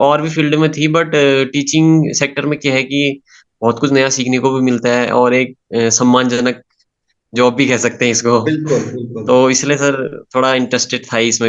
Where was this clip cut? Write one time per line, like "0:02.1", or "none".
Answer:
none